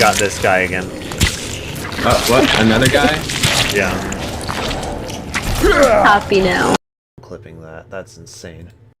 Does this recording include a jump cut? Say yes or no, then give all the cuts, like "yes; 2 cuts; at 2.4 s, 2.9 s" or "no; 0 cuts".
no; 0 cuts